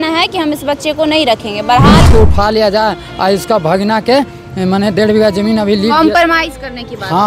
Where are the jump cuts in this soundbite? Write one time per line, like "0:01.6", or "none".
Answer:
0:02.1